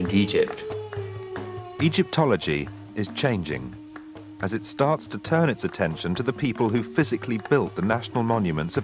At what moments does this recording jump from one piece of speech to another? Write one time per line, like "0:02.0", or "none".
0:02.1

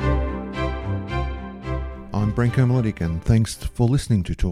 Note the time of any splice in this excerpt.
0:02.0

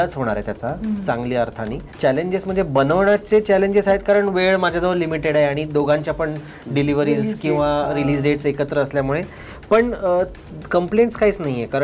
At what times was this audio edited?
0:01.8

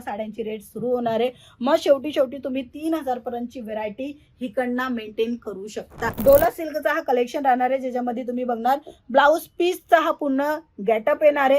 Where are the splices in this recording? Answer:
0:06.2

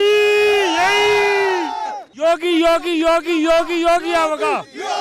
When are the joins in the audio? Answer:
0:02.0

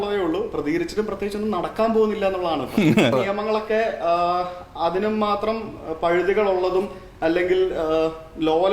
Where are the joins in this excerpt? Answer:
0:03.1

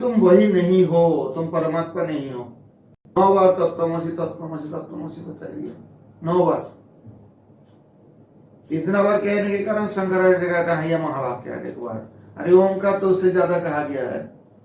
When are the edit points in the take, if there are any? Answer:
0:03.1

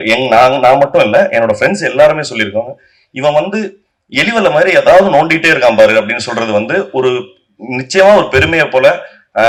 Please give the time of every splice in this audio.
none

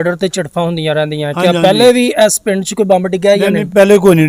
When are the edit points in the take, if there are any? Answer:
none

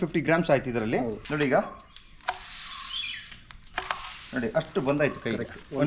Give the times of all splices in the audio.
0:01.2

